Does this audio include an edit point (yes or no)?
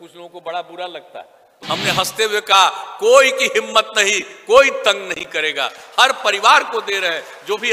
yes